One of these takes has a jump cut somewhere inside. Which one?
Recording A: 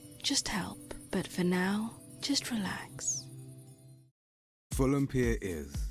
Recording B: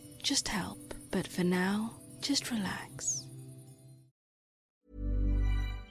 B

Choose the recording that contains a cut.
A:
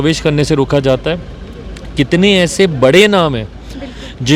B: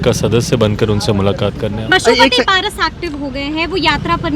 B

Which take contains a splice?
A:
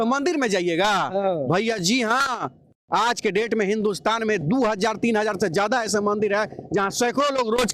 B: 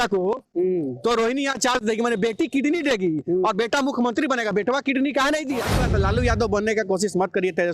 B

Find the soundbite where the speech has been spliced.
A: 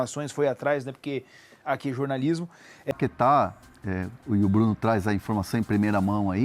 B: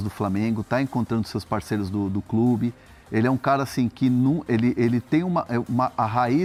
A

